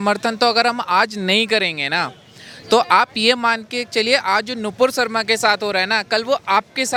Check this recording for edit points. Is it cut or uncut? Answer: uncut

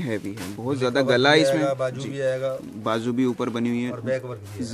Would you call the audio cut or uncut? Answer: uncut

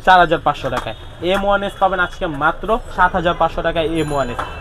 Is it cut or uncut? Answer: cut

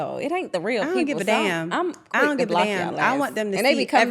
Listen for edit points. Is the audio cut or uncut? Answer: uncut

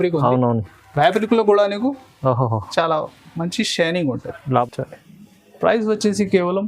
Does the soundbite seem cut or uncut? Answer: cut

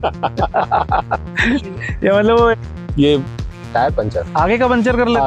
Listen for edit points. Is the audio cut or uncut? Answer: cut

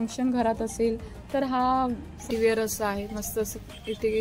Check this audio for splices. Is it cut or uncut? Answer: cut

